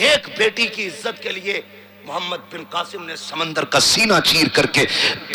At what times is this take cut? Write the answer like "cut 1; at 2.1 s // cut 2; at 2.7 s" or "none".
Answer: none

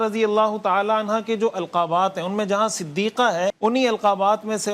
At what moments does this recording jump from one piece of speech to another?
cut 1; at 3.6 s

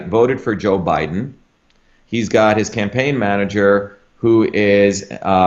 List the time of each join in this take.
none

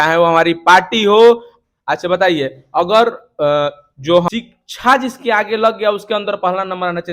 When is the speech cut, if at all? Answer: cut 1; at 4.3 s

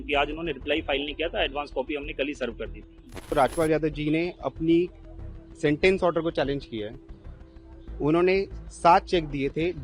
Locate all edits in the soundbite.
cut 1; at 3.2 s

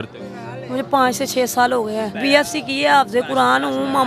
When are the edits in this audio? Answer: cut 1; at 2.2 s

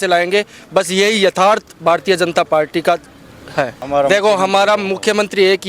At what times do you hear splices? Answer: cut 1; at 3.8 s

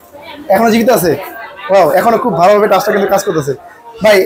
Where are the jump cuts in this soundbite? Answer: none

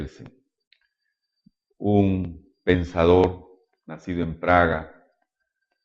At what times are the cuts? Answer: cut 1; at 2.0 s

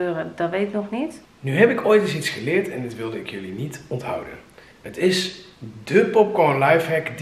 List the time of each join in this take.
cut 1; at 1.3 s

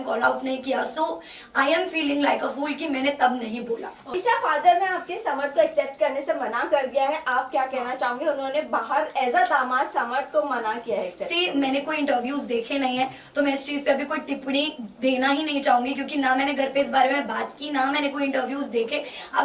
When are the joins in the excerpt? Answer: cut 1; at 4.1 s

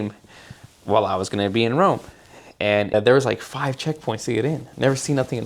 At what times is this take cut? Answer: cut 1; at 2.9 s

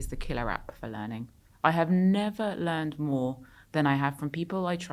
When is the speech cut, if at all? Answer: none

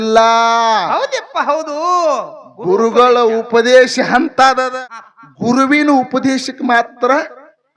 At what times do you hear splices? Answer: cut 1; at 4.7 s

